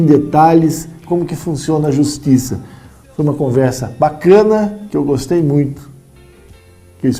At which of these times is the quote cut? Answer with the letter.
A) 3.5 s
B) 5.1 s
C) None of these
A